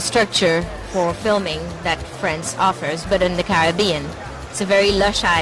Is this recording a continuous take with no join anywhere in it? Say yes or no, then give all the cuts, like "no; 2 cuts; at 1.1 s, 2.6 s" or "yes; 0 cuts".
yes; 0 cuts